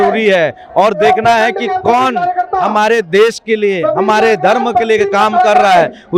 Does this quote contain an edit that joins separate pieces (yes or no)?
no